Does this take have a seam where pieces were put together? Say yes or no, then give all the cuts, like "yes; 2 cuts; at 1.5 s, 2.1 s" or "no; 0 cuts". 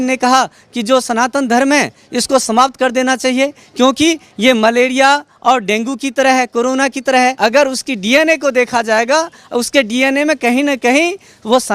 yes; 1 cut; at 7.4 s